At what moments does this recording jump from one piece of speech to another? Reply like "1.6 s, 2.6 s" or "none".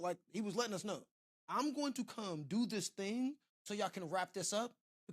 none